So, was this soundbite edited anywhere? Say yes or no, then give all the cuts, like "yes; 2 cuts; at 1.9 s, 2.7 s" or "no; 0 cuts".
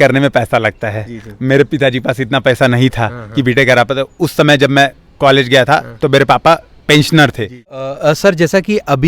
yes; 1 cut; at 7.7 s